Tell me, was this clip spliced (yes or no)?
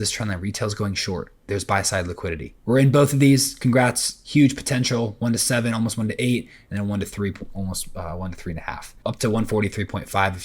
yes